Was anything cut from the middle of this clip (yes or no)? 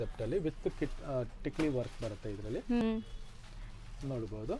yes